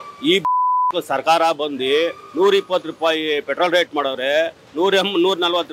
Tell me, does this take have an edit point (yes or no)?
no